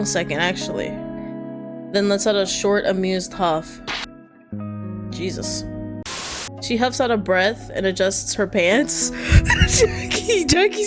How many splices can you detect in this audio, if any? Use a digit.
1